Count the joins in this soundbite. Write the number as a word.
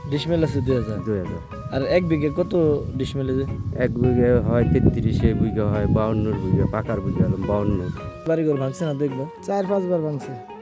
one